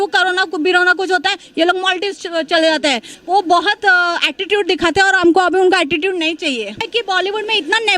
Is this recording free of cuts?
no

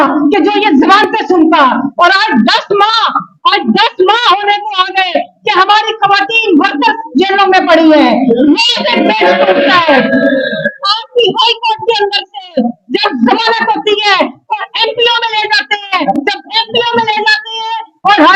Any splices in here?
no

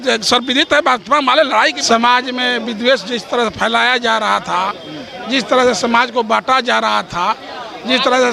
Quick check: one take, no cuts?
no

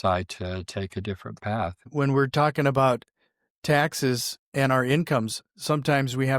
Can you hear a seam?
yes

